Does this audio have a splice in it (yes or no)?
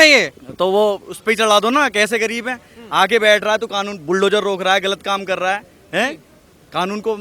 no